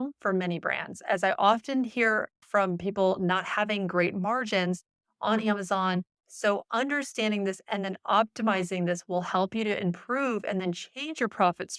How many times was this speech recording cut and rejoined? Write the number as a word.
one